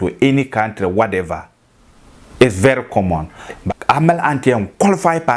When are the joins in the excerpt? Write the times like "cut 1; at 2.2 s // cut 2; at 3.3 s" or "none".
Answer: cut 1; at 3.6 s